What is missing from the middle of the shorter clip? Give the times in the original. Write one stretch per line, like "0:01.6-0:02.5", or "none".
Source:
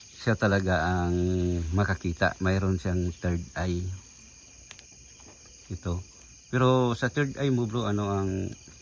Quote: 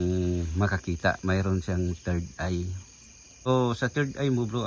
0:04.6-0:06.7